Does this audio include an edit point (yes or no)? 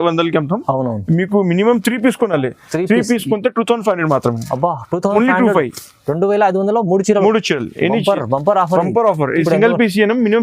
no